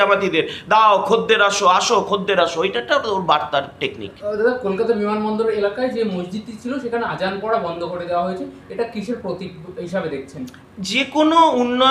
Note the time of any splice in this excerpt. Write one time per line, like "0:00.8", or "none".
none